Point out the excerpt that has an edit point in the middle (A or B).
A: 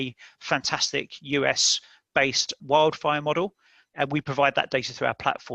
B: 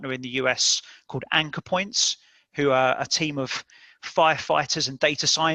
A